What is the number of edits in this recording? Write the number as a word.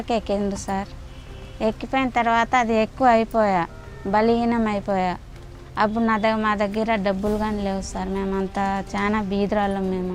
zero